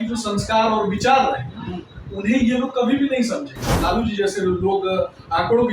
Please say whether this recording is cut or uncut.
cut